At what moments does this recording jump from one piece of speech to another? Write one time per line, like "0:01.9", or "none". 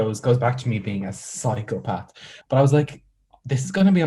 0:02.3